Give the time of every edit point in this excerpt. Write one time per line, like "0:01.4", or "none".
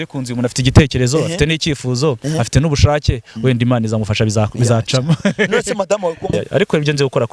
0:06.3